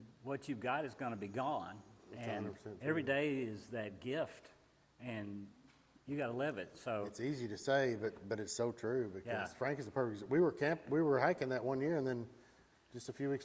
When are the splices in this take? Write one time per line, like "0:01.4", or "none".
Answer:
none

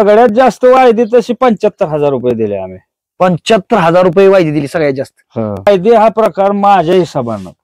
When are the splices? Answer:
0:05.7

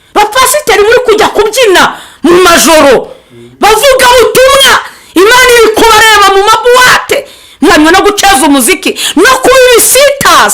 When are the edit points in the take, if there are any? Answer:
0:07.7

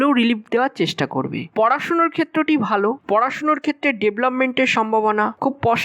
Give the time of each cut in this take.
0:01.4
0:03.0

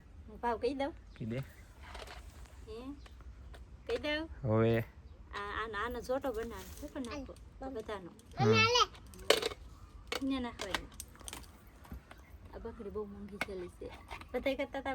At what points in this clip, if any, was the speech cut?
none

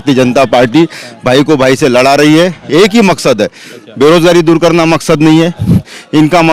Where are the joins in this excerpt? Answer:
none

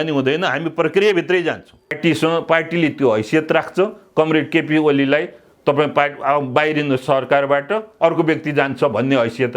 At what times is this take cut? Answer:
0:02.0

